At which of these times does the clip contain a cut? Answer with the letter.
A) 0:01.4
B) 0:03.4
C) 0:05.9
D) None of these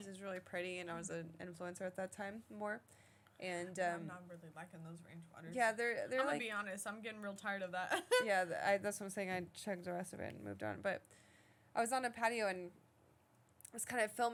D